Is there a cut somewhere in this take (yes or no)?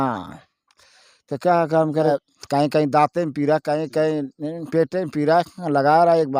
yes